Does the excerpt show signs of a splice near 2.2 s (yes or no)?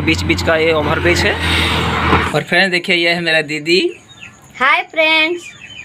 yes